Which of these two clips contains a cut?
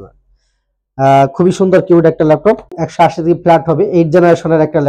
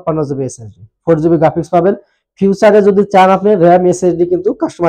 first; 1 cut; at 2.8 s

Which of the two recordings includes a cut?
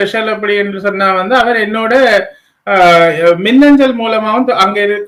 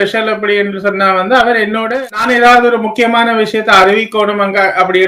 second; 1 cut; at 2.0 s

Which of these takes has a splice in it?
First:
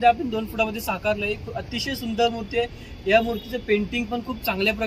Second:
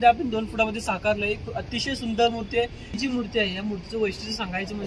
second; 1 cut; at 3.0 s

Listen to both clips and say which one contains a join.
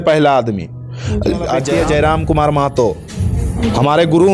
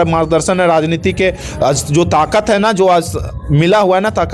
first; 1 cut; at 1.7 s

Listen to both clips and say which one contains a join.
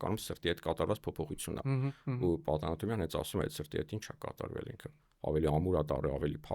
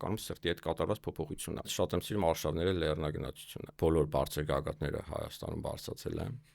second; 2 cuts; at 1.7 s, 3.6 s

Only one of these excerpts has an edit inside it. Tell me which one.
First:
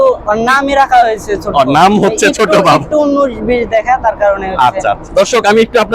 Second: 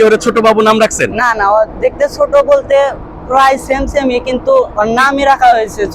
first; 1 cut; at 5.0 s

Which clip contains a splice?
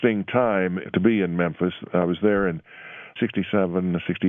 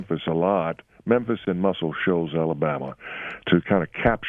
first; 2 cuts; at 0.8 s, 3.1 s

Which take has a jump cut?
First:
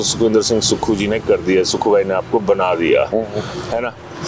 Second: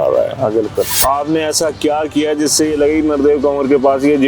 second; 1 cut; at 1.0 s

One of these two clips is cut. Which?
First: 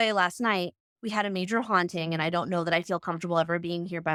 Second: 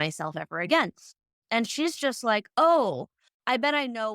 second; 1 cut; at 1.4 s

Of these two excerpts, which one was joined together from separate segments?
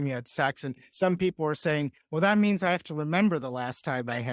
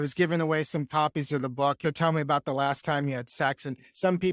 second; 1 cut; at 1.8 s

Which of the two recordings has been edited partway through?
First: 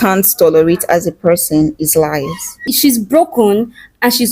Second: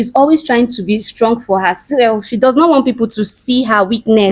first; 1 cut; at 2.6 s

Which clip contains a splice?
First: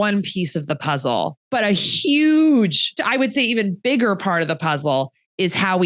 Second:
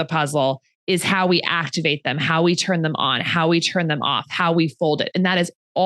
first; 2 cuts; at 1.4 s, 3.0 s

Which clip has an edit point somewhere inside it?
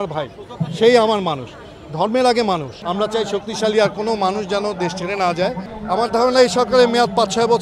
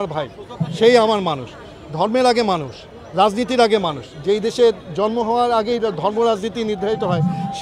first; 2 cuts; at 2.8 s, 5.7 s

